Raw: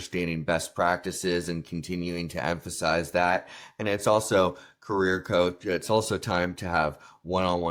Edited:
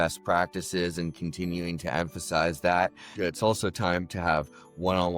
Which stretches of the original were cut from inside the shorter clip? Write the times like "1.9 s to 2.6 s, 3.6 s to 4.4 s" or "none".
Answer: 3.6 s to 5.6 s